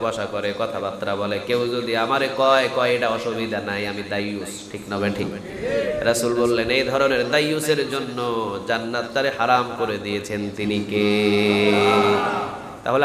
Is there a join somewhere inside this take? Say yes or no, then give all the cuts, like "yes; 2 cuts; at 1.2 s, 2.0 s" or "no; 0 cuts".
no; 0 cuts